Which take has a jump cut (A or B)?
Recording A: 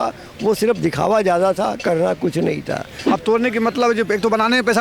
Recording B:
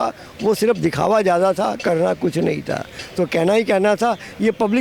A